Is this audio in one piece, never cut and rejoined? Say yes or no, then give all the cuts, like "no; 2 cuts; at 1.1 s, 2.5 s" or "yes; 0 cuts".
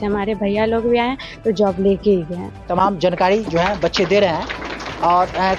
yes; 0 cuts